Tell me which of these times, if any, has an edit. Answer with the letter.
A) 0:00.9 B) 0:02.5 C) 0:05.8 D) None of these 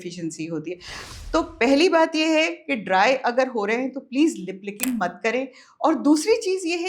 A